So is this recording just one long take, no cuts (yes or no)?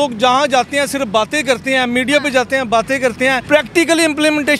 yes